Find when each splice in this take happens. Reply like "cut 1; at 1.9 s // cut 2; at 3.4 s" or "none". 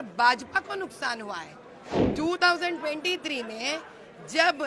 cut 1; at 2.0 s